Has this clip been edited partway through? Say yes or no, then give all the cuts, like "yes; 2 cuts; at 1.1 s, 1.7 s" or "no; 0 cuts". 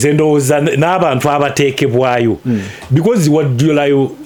no; 0 cuts